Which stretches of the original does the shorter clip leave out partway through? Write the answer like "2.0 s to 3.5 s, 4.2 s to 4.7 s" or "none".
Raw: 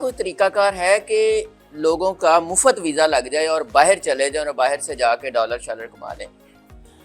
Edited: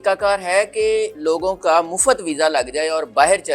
1.5 s to 1.7 s